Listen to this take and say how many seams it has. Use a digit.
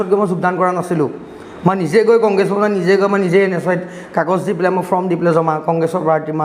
0